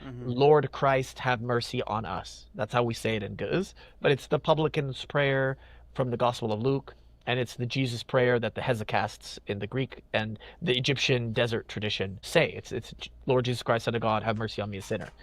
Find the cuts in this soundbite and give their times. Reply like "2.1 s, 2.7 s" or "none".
12.2 s